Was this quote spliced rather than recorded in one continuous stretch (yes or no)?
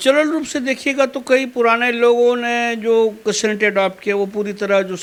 no